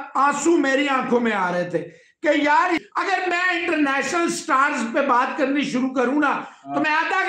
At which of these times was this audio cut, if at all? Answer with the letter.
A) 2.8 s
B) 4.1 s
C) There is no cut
A